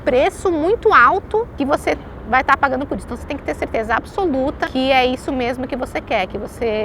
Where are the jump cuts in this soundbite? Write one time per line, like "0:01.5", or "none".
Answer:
0:01.5
0:04.6

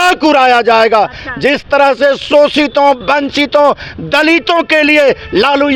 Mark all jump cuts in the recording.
none

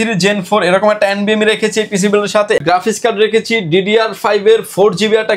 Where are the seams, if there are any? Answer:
0:02.6

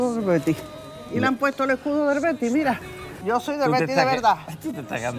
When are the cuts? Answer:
0:03.2

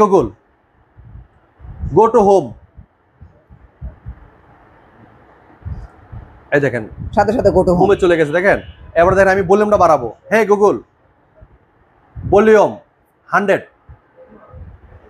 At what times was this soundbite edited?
none

